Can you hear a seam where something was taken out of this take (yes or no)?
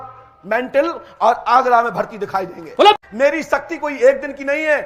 yes